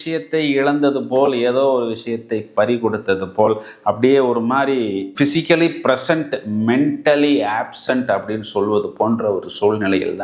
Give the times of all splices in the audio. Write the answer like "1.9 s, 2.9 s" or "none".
none